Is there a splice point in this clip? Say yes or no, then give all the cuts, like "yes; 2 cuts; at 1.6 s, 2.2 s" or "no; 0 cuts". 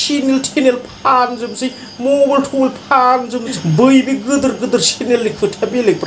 yes; 1 cut; at 3.5 s